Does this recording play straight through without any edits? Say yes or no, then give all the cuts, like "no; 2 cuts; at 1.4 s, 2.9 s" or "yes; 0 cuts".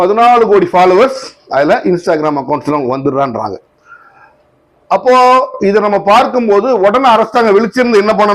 yes; 0 cuts